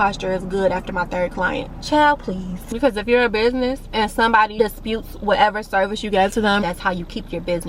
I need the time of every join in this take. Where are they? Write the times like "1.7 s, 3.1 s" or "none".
2.8 s, 4.5 s, 6.6 s